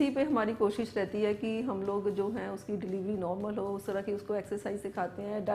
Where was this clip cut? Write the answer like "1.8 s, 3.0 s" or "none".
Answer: none